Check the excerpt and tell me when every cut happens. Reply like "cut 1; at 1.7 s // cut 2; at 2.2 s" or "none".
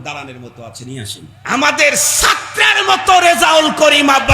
cut 1; at 1.3 s